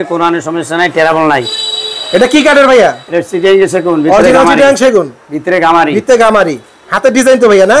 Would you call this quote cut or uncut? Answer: uncut